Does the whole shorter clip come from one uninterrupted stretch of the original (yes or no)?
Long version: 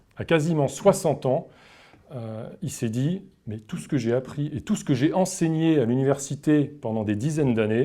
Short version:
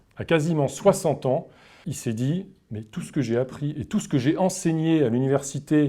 no